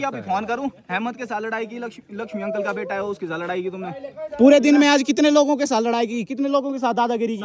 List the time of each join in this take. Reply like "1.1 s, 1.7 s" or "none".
none